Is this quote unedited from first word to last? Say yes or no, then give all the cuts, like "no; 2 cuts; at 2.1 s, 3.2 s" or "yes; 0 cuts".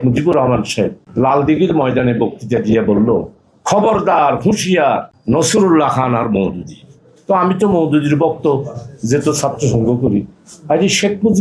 no; 2 cuts; at 1.0 s, 5.1 s